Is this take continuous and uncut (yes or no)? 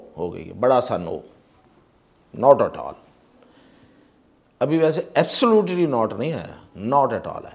yes